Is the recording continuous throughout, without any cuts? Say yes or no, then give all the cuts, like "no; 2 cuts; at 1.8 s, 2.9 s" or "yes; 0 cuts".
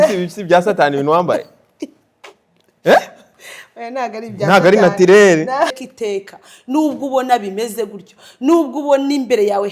no; 1 cut; at 5.8 s